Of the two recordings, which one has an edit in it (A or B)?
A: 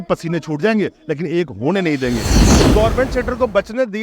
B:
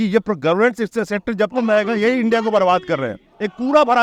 A